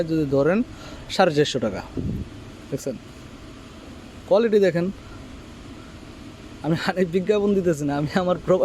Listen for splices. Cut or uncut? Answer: uncut